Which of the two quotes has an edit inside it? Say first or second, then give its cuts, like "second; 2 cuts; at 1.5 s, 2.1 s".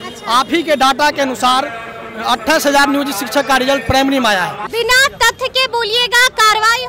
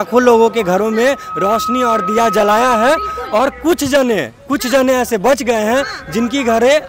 first; 1 cut; at 4.7 s